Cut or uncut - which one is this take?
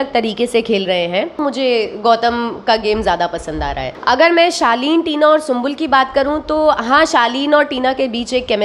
cut